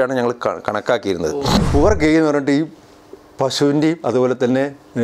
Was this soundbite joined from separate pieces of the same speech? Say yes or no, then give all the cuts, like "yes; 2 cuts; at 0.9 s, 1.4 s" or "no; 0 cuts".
yes; 1 cut; at 1.6 s